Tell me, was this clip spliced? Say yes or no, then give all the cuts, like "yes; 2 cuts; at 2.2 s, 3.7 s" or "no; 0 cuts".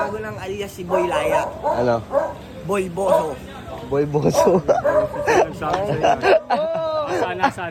no; 0 cuts